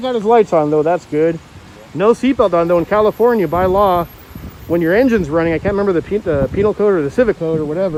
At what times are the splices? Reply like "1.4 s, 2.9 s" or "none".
none